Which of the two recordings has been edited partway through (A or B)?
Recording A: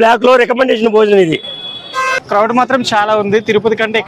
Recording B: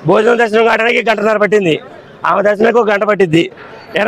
A